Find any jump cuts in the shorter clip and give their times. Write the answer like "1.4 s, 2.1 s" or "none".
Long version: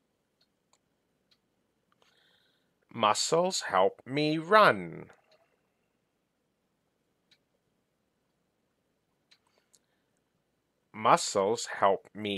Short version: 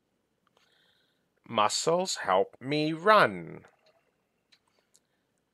4.5 s